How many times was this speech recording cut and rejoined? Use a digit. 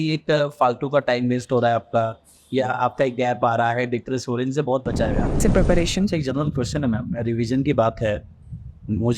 1